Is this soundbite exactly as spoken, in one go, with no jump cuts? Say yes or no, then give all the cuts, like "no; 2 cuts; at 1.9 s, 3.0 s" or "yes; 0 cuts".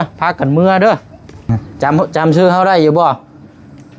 no; 1 cut; at 1.6 s